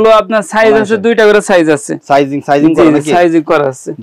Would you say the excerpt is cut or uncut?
uncut